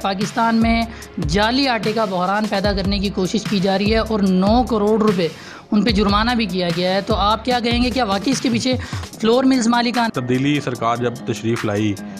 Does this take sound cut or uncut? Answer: cut